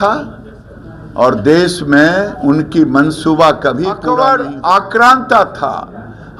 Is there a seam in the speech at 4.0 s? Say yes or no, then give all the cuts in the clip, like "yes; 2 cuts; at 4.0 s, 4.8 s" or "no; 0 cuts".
yes; 1 cut; at 4.0 s